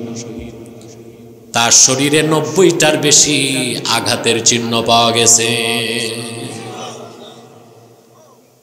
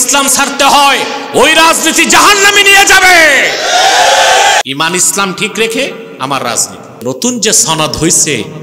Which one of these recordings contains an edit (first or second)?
second